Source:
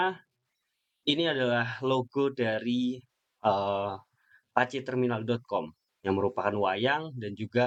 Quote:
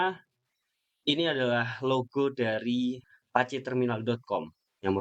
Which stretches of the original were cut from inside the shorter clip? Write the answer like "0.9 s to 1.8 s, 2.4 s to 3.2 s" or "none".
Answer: 3.1 s to 4.3 s